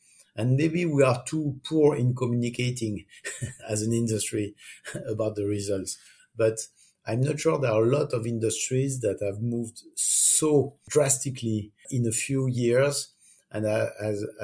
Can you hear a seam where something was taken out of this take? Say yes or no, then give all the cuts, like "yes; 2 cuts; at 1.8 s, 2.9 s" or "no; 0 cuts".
yes; 2 cuts; at 10.8 s, 11.9 s